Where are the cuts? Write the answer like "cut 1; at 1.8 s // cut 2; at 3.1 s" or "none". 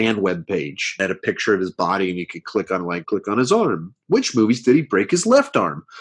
cut 1; at 0.9 s // cut 2; at 3.0 s